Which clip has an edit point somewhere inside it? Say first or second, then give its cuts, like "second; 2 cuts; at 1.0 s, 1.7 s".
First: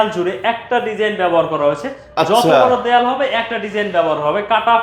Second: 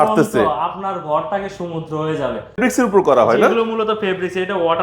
second; 1 cut; at 2.6 s